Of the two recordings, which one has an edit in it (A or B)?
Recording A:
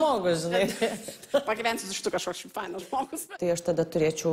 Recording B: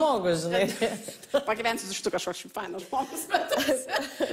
A